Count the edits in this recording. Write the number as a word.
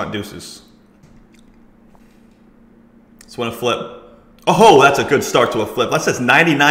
two